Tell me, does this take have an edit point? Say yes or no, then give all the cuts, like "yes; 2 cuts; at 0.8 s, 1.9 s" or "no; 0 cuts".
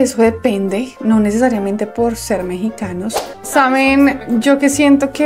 yes; 1 cut; at 3.3 s